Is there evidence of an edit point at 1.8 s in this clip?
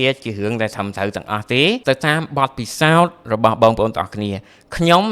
yes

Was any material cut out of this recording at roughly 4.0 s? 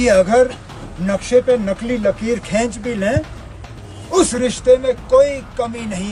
no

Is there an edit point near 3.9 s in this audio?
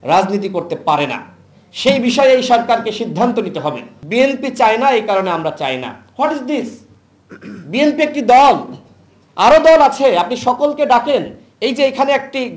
yes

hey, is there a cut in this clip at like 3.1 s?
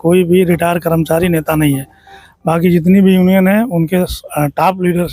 no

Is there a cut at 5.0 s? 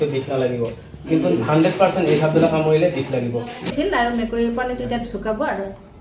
no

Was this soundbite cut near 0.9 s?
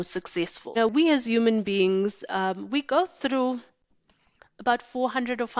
yes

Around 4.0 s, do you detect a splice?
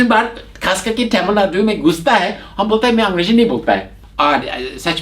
yes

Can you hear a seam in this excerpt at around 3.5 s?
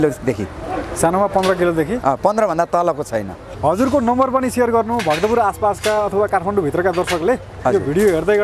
yes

